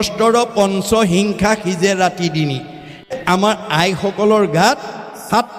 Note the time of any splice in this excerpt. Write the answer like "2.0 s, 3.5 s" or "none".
3.1 s